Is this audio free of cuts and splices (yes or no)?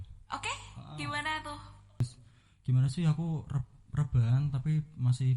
no